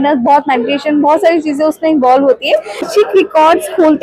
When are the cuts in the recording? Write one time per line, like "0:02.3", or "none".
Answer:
0:02.9